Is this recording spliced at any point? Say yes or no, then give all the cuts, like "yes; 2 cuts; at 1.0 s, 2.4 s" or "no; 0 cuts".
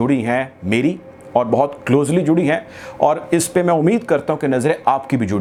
no; 0 cuts